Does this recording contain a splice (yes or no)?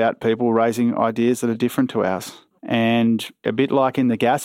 yes